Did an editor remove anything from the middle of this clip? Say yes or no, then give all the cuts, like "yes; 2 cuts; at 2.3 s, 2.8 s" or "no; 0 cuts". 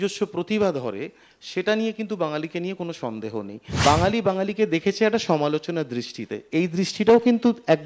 yes; 1 cut; at 3.6 s